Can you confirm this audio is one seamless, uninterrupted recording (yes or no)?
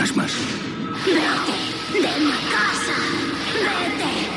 yes